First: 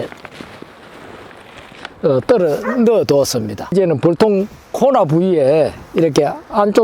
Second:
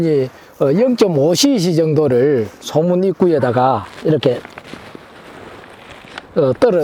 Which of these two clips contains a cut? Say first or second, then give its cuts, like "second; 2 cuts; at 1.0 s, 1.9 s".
first; 1 cut; at 3.6 s